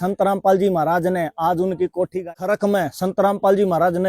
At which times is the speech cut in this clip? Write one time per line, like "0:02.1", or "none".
0:02.2